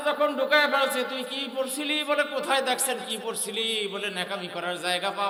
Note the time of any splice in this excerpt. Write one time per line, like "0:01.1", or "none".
none